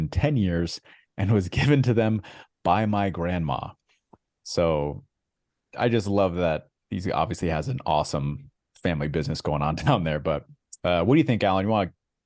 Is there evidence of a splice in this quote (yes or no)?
no